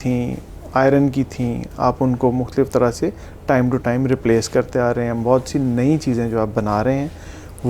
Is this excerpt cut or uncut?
uncut